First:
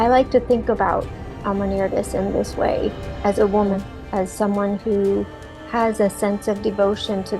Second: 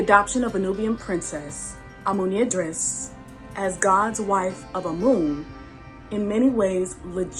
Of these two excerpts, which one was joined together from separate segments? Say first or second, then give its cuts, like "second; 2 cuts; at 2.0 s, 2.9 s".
first; 1 cut; at 3.8 s